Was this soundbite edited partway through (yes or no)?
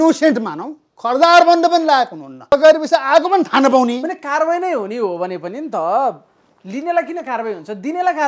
yes